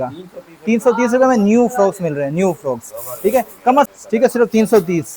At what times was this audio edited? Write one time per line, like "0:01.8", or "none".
0:03.9